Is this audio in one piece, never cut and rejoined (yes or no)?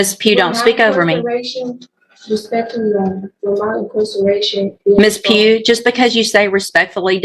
yes